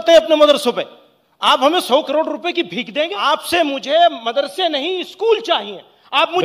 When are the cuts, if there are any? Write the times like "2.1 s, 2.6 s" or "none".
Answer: 3.1 s